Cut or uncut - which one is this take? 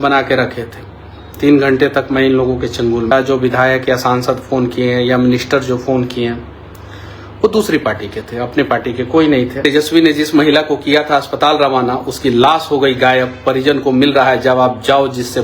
cut